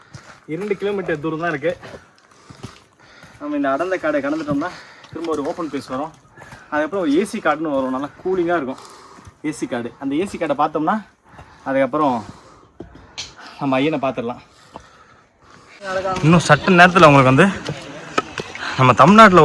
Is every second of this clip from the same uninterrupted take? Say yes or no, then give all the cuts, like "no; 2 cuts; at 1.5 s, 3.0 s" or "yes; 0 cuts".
no; 1 cut; at 15.8 s